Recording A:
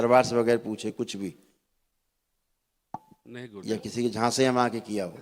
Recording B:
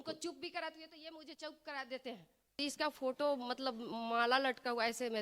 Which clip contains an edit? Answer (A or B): B